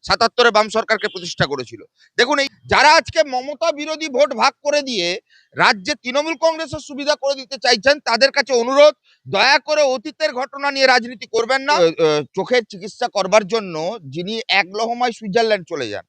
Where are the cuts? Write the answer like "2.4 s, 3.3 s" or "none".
2.3 s, 11.6 s